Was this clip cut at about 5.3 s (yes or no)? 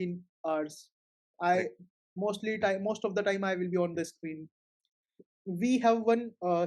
yes